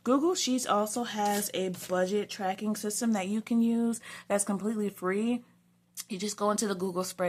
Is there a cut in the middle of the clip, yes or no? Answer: no